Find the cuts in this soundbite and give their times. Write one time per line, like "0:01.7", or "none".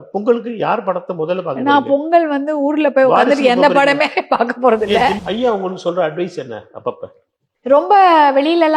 0:05.2